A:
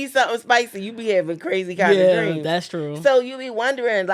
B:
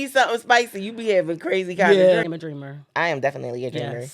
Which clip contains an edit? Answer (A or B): B